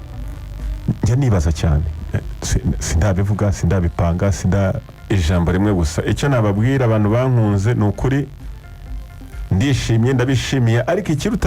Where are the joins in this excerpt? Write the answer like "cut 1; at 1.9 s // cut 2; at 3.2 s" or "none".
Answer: cut 1; at 4.9 s